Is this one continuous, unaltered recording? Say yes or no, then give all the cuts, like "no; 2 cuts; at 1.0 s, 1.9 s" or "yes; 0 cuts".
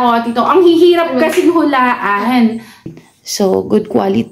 no; 1 cut; at 2.9 s